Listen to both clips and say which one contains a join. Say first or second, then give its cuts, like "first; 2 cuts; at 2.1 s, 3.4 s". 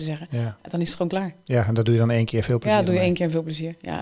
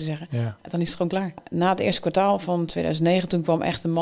second; 1 cut; at 1.4 s